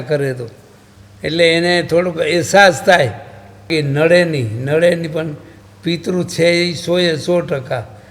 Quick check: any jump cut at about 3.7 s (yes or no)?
yes